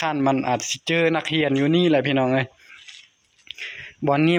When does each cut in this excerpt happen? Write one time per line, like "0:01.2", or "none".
none